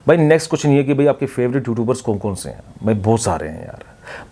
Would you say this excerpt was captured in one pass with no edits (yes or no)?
yes